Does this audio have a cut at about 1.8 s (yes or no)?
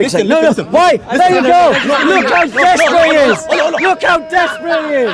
no